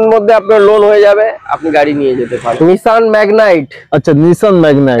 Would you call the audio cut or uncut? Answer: cut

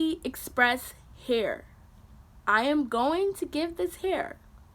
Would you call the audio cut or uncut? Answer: uncut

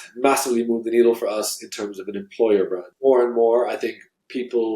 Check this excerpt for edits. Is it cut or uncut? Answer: cut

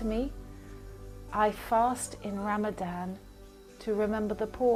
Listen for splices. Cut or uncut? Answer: uncut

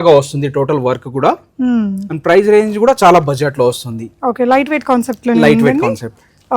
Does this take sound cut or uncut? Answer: uncut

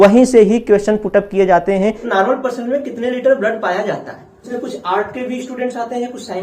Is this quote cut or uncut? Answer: cut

